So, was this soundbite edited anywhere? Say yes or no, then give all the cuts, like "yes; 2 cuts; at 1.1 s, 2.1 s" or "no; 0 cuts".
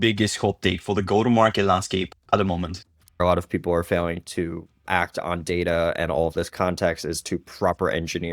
yes; 1 cut; at 3.2 s